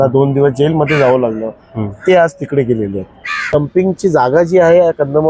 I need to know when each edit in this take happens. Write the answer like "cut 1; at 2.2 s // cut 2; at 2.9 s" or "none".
cut 1; at 3.5 s